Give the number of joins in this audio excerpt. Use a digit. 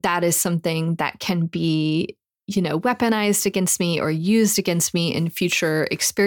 0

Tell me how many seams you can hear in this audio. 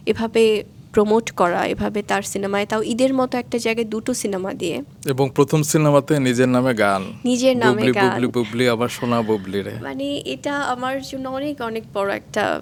0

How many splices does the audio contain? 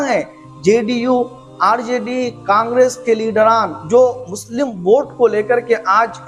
0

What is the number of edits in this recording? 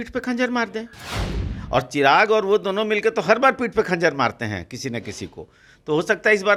0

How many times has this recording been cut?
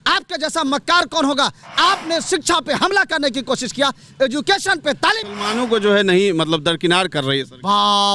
1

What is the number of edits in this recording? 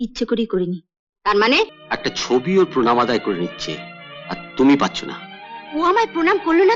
1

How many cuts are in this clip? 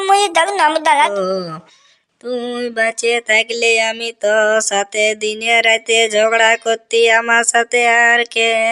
1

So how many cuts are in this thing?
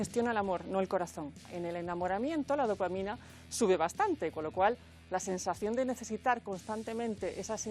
1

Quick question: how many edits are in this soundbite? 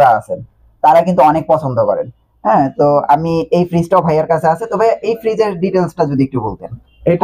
0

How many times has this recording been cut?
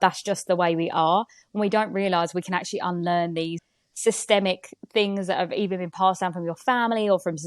1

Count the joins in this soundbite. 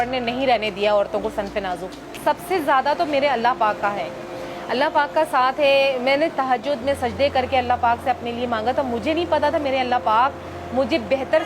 1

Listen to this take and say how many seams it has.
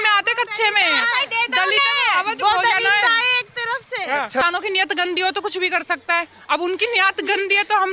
1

